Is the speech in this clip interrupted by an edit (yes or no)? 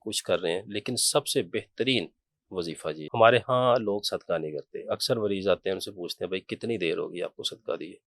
yes